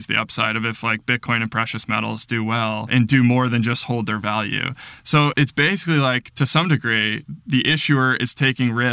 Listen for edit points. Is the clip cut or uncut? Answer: cut